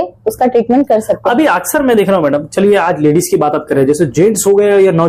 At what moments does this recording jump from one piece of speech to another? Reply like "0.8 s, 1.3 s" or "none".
none